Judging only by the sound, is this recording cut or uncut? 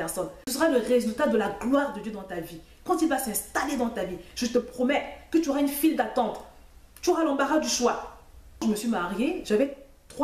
cut